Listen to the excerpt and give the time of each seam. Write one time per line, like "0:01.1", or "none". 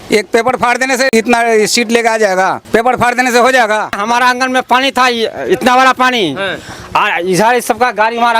0:01.1
0:02.6
0:04.0